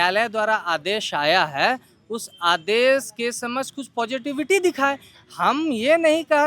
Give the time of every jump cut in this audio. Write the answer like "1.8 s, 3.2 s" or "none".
none

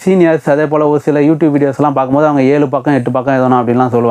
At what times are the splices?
none

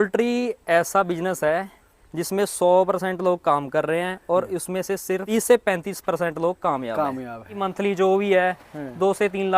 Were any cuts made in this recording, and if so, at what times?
5.3 s, 7.6 s

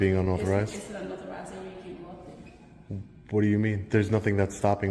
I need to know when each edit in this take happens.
none

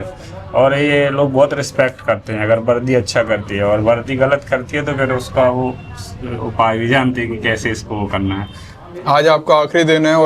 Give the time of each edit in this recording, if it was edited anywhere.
8.6 s

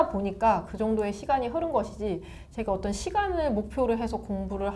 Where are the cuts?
none

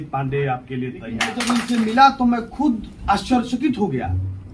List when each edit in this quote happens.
1.3 s

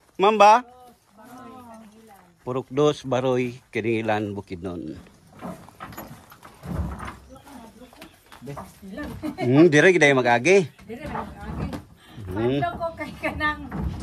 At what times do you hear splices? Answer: none

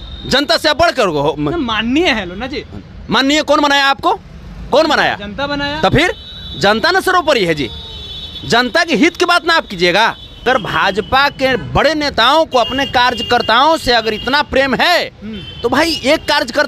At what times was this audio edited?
10.4 s

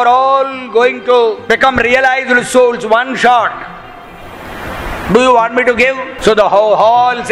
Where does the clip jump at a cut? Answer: 1.5 s, 6.1 s

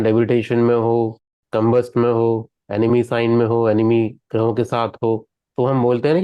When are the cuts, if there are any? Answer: 1.4 s

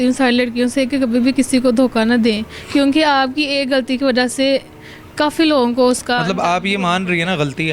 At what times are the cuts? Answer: none

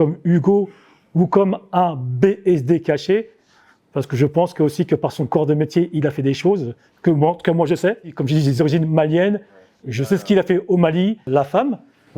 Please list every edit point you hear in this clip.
8.2 s, 11.3 s

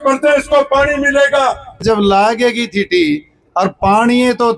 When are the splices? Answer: 1.8 s

